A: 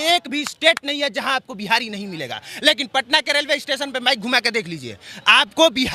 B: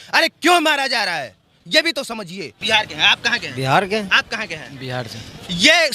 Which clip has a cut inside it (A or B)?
B